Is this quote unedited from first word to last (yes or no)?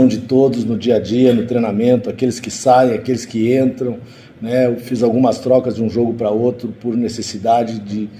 yes